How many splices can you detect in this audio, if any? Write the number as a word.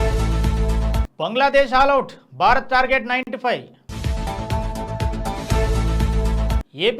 one